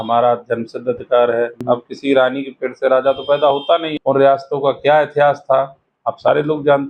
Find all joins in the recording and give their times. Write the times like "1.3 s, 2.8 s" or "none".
1.6 s, 3.9 s